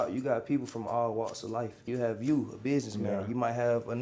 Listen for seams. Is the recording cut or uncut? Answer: cut